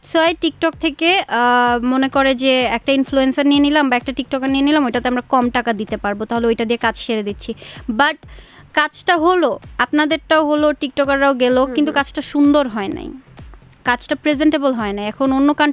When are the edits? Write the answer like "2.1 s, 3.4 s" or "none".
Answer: none